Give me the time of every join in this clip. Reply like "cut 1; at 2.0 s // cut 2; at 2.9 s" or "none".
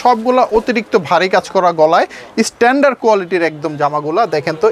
none